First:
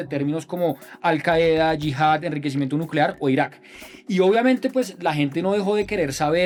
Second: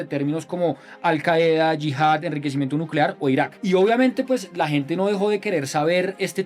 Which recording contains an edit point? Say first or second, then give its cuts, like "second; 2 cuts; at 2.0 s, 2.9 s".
second; 1 cut; at 3.6 s